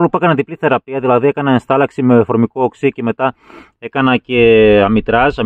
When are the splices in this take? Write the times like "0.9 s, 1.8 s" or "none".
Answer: none